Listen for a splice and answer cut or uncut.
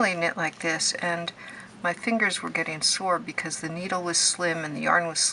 uncut